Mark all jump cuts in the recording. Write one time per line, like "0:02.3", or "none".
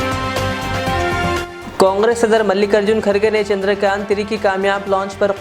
0:01.3